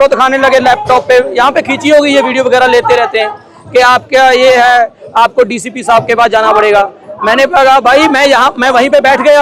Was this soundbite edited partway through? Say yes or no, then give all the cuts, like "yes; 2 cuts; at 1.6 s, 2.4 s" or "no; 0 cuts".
no; 0 cuts